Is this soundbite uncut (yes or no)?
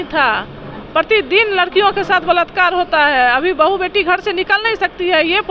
yes